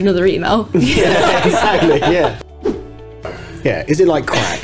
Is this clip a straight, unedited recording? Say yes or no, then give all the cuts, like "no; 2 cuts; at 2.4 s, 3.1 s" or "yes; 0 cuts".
no; 1 cut; at 3.0 s